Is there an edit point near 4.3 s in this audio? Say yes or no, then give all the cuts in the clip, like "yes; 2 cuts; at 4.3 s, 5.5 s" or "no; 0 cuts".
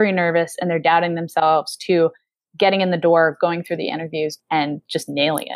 yes; 1 cut; at 4.3 s